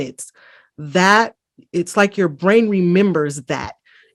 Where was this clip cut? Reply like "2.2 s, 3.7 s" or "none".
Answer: none